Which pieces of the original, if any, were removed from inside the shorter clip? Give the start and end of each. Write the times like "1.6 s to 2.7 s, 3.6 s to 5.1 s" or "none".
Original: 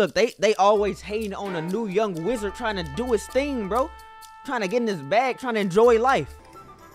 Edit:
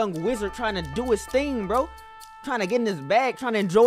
none